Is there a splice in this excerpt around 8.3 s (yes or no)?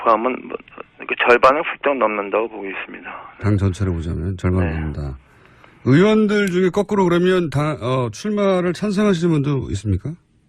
no